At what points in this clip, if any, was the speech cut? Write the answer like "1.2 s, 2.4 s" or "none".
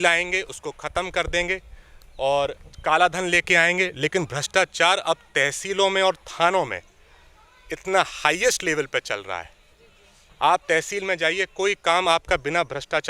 none